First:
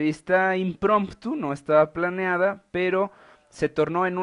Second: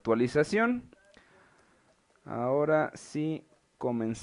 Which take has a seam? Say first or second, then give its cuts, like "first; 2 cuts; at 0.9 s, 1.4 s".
second; 1 cut; at 1.1 s